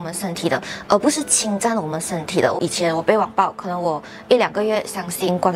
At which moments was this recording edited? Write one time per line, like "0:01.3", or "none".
0:02.6